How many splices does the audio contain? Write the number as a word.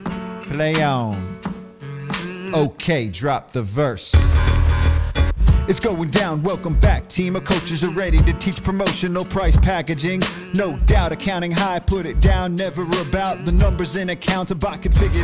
zero